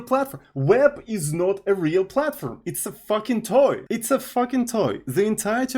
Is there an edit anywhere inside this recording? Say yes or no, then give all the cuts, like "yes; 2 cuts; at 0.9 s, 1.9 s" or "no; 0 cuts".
yes; 1 cut; at 3.8 s